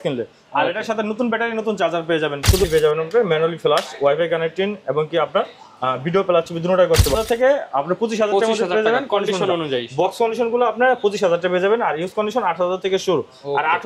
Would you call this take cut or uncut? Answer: cut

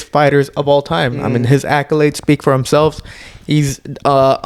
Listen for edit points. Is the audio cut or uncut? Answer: uncut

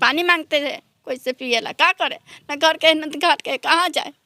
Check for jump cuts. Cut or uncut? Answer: uncut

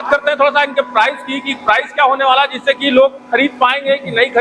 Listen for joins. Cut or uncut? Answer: uncut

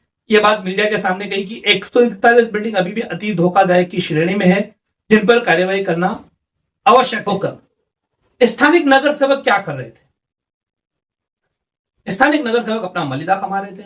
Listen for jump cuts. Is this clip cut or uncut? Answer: cut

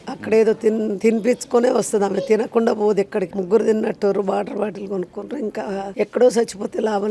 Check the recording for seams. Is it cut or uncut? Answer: cut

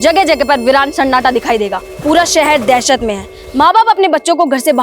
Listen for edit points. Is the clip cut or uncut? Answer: cut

